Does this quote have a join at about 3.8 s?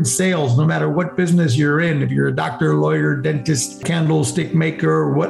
yes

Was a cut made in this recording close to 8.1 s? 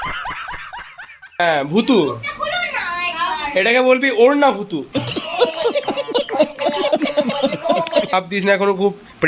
yes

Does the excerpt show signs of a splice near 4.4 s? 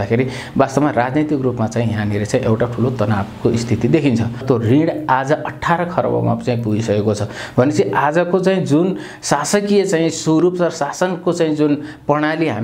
yes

